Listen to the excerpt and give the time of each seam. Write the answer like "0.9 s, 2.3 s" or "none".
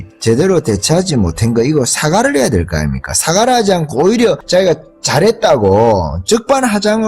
4.4 s